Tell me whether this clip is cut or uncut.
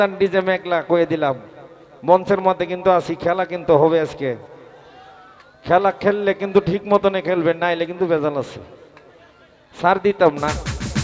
uncut